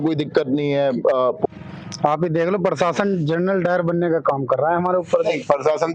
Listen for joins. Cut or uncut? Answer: cut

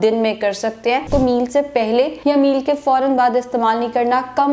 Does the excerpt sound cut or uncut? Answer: cut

